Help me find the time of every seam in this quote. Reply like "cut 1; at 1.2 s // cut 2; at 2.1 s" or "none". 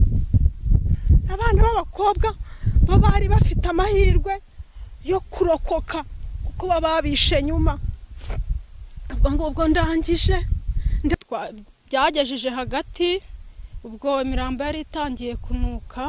cut 1; at 11.1 s